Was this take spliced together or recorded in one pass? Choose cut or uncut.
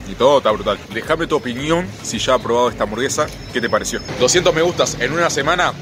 cut